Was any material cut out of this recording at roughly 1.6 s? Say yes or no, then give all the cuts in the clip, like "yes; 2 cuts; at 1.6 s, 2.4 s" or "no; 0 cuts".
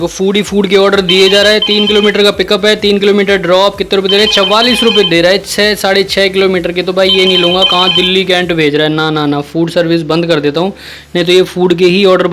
no; 0 cuts